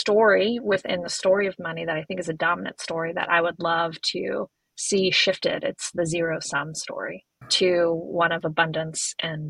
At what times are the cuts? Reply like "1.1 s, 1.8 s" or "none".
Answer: none